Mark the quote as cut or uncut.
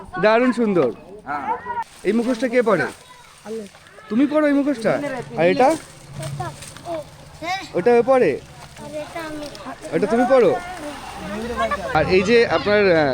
cut